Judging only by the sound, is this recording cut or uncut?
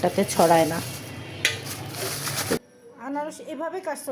cut